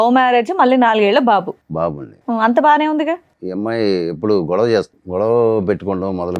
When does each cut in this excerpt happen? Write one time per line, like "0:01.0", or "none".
0:03.4
0:05.0